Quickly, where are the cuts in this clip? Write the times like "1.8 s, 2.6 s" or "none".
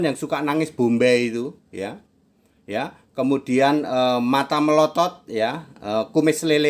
none